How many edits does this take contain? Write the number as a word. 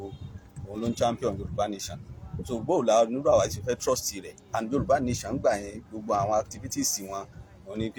zero